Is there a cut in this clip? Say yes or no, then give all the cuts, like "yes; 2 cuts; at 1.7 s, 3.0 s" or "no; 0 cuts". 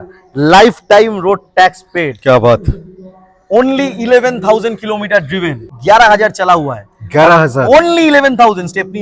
yes; 1 cut; at 5.7 s